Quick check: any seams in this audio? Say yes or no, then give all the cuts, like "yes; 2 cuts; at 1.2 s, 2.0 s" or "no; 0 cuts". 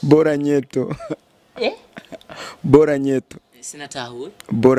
no; 0 cuts